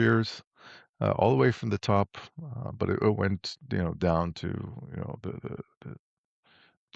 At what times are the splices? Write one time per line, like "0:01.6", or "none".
none